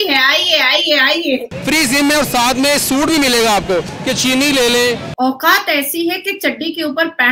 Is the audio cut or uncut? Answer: cut